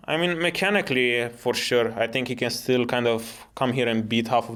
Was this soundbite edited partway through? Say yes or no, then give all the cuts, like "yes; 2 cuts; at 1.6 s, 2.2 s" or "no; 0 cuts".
no; 0 cuts